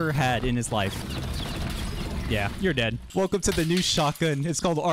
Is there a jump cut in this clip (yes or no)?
yes